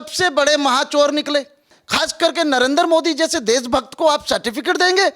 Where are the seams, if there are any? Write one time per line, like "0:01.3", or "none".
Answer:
0:01.8

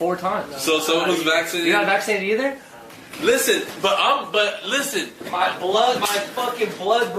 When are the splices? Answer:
0:02.6

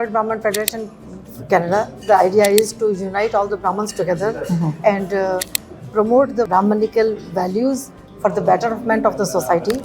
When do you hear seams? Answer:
0:06.5

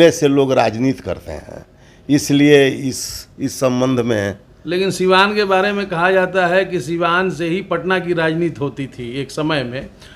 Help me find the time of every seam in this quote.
none

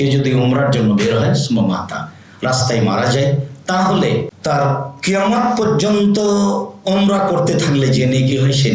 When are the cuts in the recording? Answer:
0:04.3

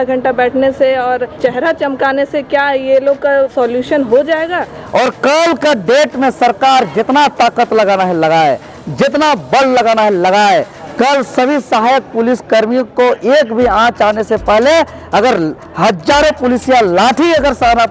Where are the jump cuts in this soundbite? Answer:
0:01.4
0:03.5
0:04.7
0:10.8

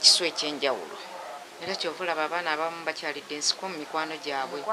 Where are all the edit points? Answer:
0:01.5

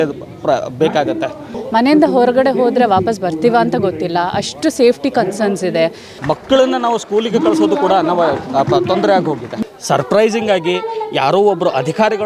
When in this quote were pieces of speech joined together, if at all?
0:01.6
0:06.1
0:09.5

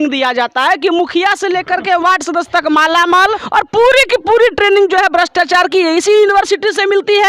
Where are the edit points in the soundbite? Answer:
0:03.4

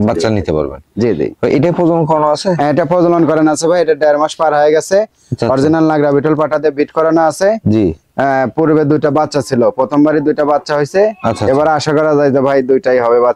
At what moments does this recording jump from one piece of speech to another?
none

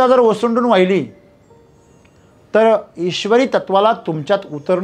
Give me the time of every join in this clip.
none

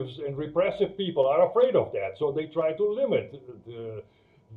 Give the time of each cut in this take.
none

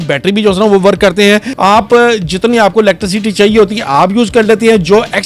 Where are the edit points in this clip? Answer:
0:01.5

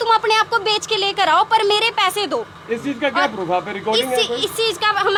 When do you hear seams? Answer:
none

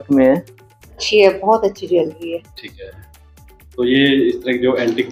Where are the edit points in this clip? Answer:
0:01.0

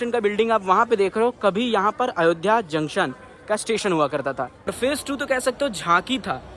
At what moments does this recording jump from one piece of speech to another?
0:04.7

